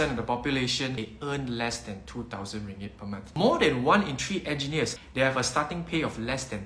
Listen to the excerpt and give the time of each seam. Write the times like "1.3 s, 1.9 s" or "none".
1.1 s, 3.2 s, 5.0 s